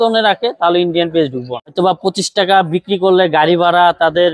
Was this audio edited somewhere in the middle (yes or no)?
yes